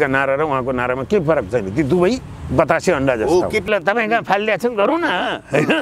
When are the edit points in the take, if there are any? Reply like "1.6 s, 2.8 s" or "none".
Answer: 3.7 s